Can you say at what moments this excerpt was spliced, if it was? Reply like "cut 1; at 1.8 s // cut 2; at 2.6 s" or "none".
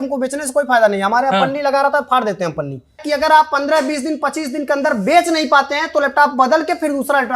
cut 1; at 3.0 s